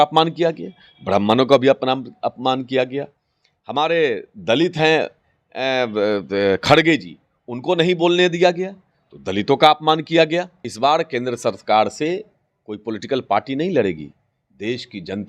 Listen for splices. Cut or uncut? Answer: cut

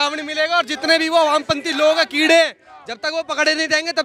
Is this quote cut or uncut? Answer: uncut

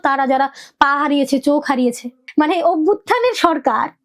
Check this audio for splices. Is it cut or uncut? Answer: cut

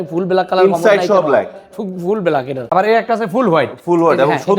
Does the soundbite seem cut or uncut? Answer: cut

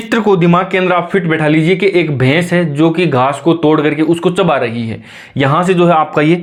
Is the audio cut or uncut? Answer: uncut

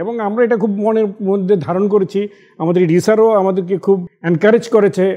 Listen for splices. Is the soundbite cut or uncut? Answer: cut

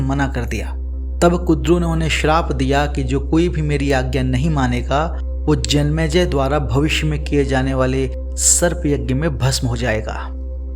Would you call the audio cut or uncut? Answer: uncut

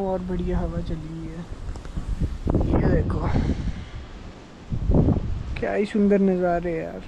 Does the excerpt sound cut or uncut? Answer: uncut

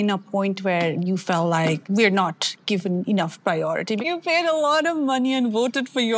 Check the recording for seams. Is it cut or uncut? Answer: cut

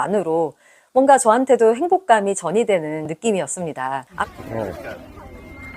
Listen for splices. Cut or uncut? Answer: cut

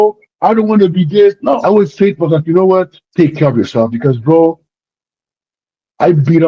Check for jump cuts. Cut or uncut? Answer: cut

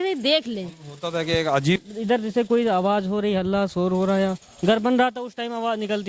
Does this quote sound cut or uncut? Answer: cut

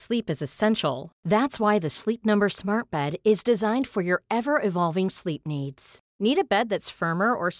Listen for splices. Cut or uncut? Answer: uncut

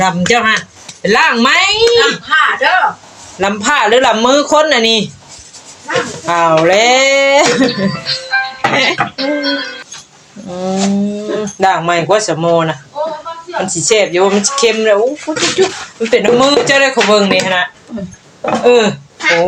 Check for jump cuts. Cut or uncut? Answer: uncut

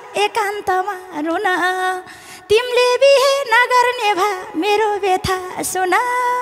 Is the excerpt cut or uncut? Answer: uncut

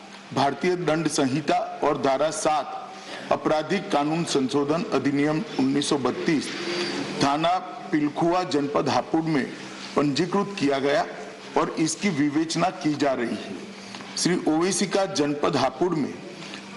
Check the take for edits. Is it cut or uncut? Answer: cut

